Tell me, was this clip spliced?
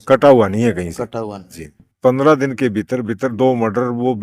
yes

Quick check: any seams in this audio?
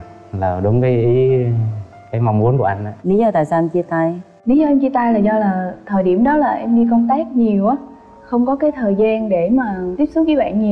yes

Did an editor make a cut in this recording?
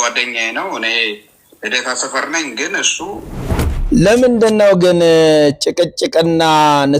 yes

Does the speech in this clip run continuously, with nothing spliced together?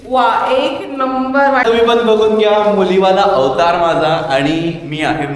no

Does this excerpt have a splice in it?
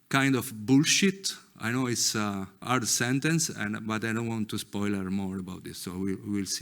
yes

